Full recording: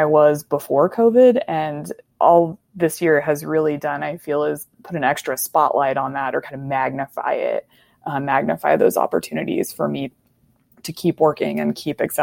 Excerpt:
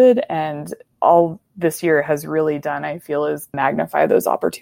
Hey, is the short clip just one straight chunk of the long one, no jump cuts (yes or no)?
no